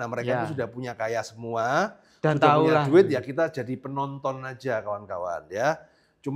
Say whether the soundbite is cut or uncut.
uncut